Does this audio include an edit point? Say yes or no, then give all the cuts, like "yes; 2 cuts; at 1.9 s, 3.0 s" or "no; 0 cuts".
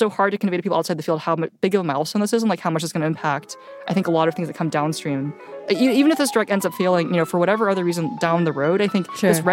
yes; 1 cut; at 5.6 s